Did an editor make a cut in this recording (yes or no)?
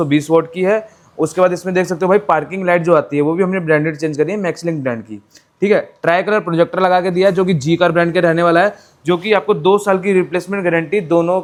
no